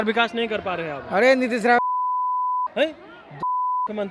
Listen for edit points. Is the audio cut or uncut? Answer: uncut